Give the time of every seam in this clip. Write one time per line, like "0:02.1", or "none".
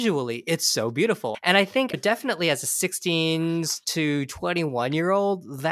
0:01.3